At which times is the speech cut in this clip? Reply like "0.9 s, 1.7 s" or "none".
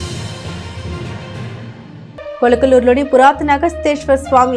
1.6 s